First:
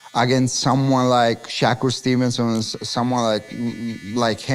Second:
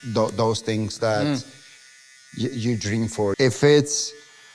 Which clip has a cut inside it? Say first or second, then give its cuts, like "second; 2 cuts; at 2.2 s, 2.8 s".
second; 1 cut; at 3.3 s